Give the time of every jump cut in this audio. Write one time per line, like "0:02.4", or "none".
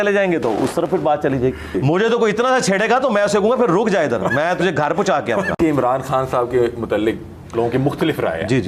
0:01.8
0:05.6